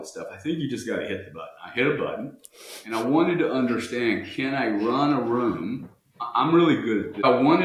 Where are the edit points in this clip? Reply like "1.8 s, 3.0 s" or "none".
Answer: none